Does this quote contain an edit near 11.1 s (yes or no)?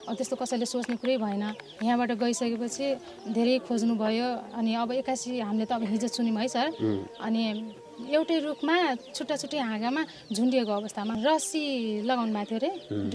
yes